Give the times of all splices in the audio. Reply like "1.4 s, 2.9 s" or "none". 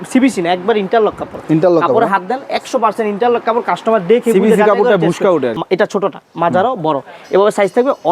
5.6 s